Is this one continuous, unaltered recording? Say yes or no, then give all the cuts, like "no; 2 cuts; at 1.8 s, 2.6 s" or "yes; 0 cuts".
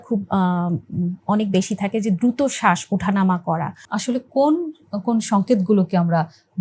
no; 1 cut; at 3.9 s